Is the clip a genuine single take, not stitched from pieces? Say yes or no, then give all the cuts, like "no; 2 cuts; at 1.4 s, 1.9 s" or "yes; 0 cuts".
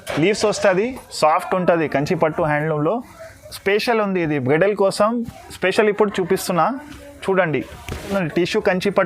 no; 2 cuts; at 1.0 s, 8.1 s